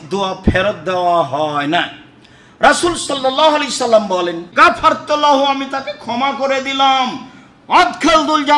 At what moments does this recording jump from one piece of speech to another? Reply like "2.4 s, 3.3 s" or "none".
4.5 s